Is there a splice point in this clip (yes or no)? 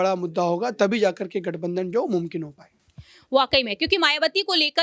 no